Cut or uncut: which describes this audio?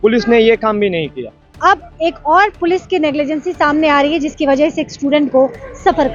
cut